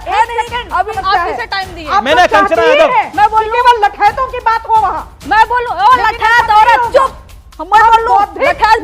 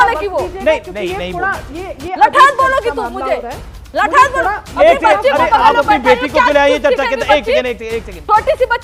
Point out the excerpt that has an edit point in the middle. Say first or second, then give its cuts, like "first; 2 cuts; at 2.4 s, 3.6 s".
first; 2 cuts; at 1.0 s, 5.1 s